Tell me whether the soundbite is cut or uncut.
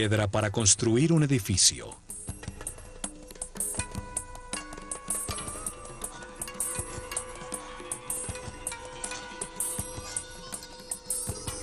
uncut